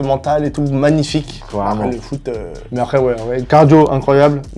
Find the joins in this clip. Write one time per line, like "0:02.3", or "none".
0:02.5